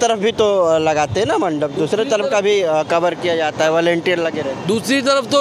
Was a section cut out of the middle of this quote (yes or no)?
no